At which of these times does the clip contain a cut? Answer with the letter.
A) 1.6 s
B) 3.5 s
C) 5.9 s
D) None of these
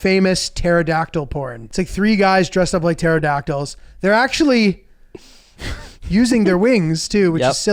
A